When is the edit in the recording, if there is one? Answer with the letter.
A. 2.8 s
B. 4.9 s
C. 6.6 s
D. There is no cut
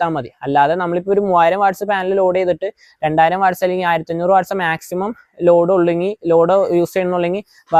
D